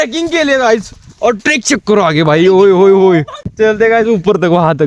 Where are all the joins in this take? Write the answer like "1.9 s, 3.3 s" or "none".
3.4 s

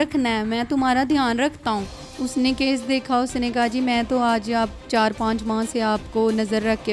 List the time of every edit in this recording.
2.0 s

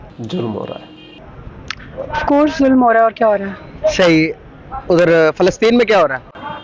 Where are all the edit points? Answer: none

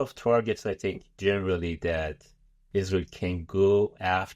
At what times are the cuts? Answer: 1.1 s

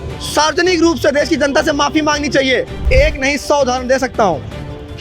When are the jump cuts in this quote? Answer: 2.8 s

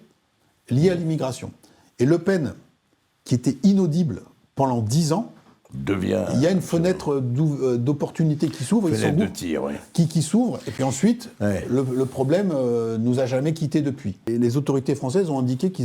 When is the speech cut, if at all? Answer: 14.3 s

